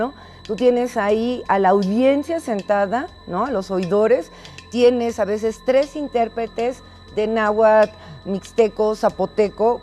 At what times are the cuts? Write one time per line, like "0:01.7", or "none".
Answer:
0:01.6